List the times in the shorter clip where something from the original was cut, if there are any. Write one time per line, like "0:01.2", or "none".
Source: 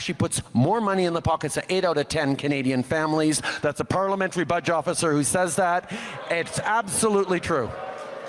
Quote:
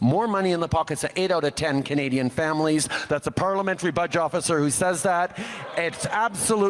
none